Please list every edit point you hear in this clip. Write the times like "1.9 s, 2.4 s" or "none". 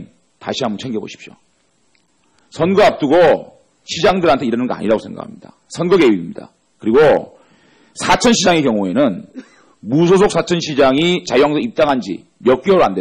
8.8 s